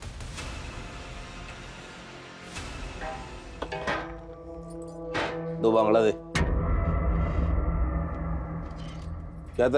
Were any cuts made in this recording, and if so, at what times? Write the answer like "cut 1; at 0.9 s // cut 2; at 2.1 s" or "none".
cut 1; at 3.1 s